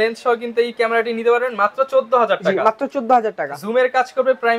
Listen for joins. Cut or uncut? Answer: uncut